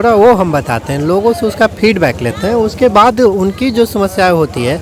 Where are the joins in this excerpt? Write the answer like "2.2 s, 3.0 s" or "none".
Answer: none

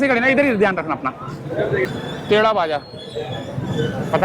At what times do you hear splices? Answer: 1.9 s

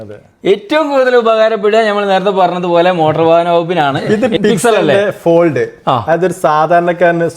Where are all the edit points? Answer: 4.1 s

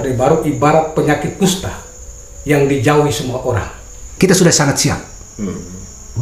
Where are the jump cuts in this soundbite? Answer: 4.1 s

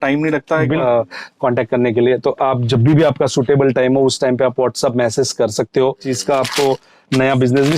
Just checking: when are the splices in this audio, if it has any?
0.8 s, 6.1 s

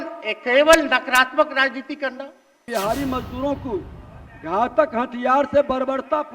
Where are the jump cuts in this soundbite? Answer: 2.7 s

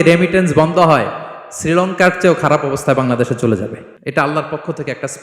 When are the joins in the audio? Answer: 3.9 s

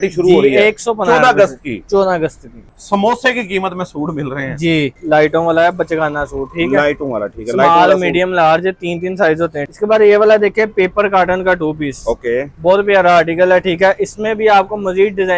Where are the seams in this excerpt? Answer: 2.7 s, 5.0 s, 9.6 s

